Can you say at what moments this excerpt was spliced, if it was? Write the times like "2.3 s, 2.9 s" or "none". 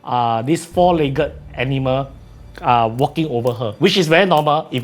none